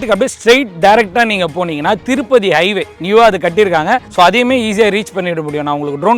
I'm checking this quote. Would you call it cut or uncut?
uncut